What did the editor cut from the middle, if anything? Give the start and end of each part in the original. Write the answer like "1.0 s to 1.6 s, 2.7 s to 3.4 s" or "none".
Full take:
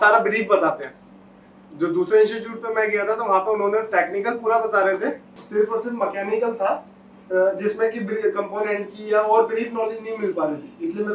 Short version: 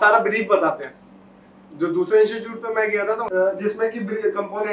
3.2 s to 7.2 s